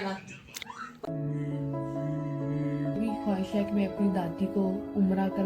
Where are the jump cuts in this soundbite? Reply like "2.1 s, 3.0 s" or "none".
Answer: 1.0 s